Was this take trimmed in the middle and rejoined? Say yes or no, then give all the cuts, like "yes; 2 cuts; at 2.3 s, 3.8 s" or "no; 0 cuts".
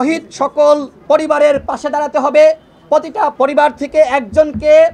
yes; 2 cuts; at 0.9 s, 3.3 s